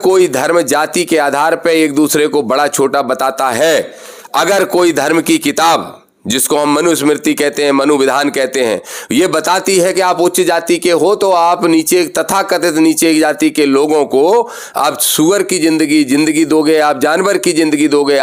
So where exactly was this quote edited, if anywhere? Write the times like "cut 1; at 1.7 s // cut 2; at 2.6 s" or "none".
none